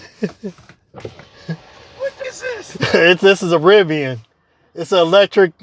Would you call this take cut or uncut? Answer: cut